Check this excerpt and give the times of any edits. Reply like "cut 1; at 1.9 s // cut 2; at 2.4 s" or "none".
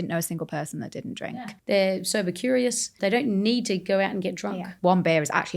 cut 1; at 1.3 s // cut 2; at 2.9 s // cut 3; at 4.7 s